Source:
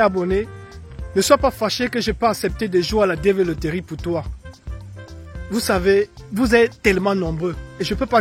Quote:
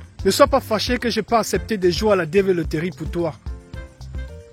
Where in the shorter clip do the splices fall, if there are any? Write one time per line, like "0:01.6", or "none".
none